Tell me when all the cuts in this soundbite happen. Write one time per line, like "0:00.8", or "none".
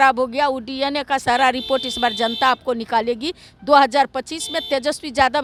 none